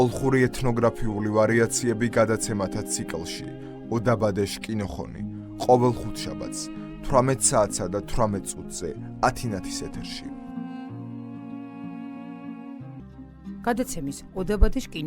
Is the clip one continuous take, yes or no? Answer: no